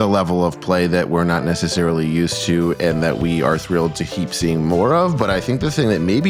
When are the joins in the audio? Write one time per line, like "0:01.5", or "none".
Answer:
none